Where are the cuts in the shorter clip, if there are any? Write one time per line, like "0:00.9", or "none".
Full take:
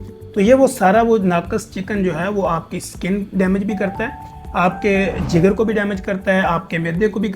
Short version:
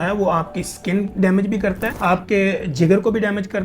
0:01.9